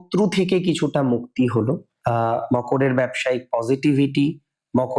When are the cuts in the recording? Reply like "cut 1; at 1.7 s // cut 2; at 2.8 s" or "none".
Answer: cut 1; at 2.0 s